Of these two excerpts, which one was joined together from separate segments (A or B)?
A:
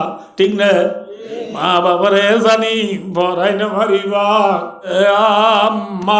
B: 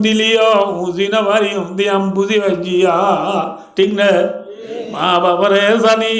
A